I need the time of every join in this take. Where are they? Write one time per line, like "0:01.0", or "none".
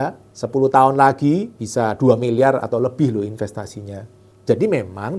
0:01.6